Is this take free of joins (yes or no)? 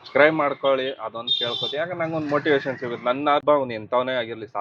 no